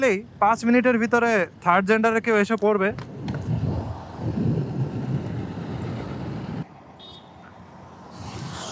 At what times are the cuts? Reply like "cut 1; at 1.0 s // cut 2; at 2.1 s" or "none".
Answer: cut 1; at 6.6 s